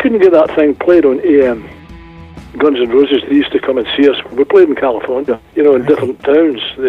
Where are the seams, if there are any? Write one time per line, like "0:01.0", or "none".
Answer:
0:01.9
0:05.4